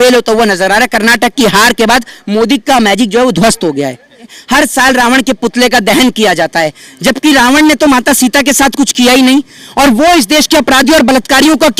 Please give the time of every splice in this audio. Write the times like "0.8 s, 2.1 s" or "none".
4.3 s